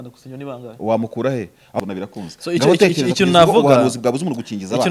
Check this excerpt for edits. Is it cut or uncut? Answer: cut